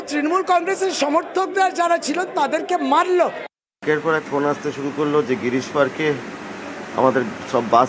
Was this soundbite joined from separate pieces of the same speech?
yes; 1 cut; at 3.7 s

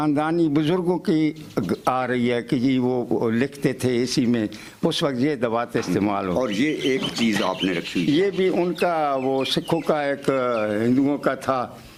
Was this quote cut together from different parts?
no; 0 cuts

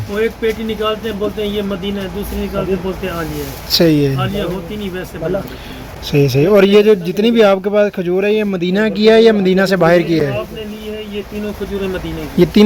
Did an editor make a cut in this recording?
no; 0 cuts

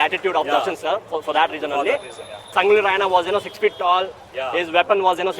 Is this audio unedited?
no; 1 cut; at 2.4 s

